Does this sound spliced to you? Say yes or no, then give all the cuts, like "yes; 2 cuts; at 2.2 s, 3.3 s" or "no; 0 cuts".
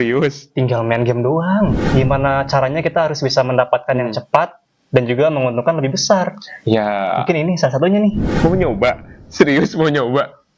yes; 2 cuts; at 1.8 s, 8.3 s